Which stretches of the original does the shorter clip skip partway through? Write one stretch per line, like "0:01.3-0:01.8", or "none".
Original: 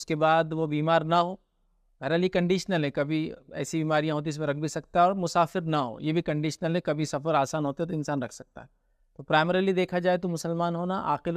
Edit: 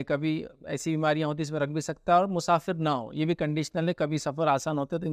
none